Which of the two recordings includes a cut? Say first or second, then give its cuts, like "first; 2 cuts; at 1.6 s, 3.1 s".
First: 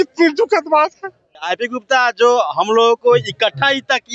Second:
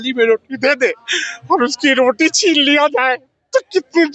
first; 1 cut; at 1.5 s